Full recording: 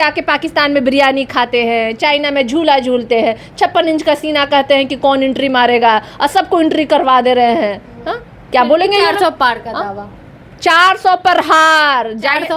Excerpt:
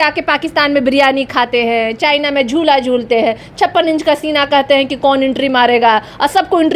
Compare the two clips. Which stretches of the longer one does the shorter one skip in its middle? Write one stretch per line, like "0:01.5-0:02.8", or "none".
none